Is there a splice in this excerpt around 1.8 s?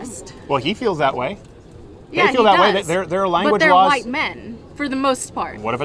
no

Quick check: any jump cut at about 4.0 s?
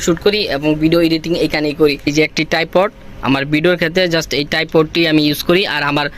no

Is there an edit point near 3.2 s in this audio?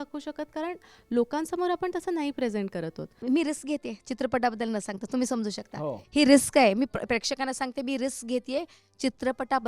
yes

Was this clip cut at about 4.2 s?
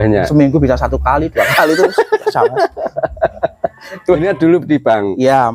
yes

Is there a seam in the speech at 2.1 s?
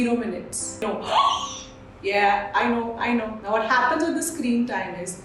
no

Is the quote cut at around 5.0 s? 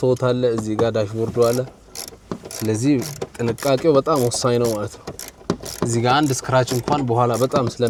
no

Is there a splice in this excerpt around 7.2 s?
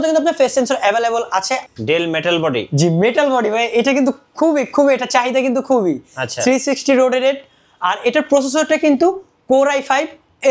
no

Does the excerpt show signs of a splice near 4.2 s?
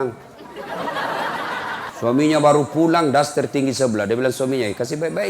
no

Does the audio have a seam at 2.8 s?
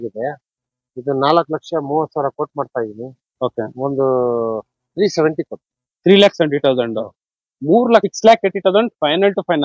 no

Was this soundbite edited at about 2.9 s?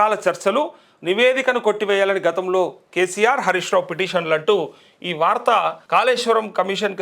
no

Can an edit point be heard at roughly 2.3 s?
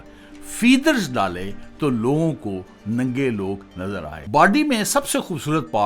no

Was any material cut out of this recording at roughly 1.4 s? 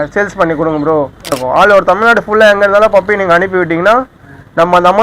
yes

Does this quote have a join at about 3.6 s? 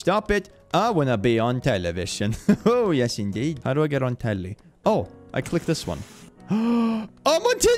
yes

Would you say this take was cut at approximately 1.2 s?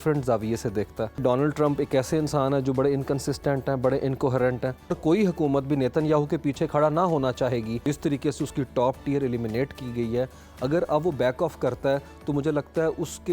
yes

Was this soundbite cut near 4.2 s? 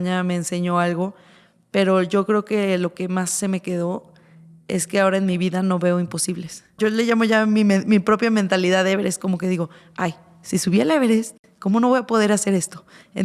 no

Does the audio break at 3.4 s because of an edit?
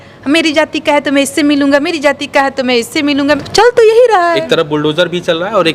yes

